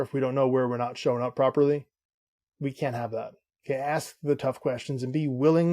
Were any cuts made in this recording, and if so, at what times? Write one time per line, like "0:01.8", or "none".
0:03.5